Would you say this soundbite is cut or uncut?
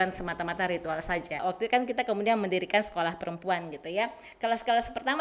cut